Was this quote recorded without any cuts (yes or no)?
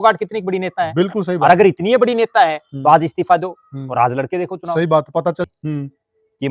no